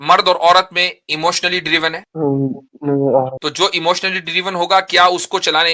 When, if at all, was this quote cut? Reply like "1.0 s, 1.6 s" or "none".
2.0 s, 3.4 s